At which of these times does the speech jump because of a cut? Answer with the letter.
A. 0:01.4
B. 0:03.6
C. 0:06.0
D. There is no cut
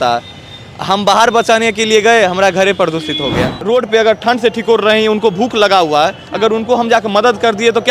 B